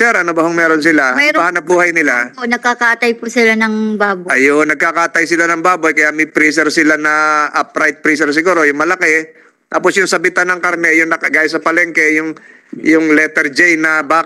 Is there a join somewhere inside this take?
no; 0 cuts

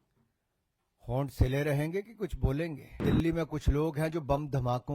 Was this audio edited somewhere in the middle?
yes; 1 cut; at 3.0 s

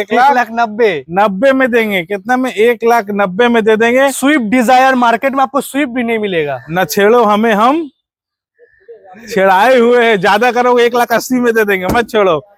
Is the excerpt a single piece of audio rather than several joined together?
yes; 0 cuts

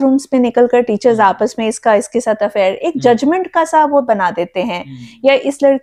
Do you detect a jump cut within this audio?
no; 0 cuts

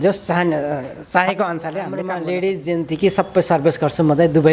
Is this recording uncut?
no; 1 cut; at 2.0 s

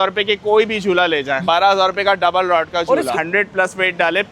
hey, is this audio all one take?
no; 2 cuts; at 1.4 s, 3.1 s

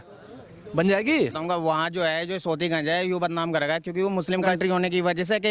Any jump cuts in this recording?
yes; 2 cuts; at 1.4 s, 4.5 s

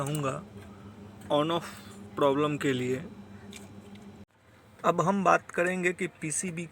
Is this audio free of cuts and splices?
no; 1 cut; at 4.3 s

